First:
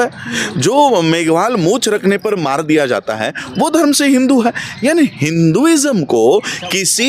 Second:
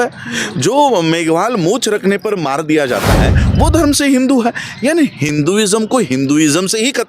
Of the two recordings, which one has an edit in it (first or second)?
second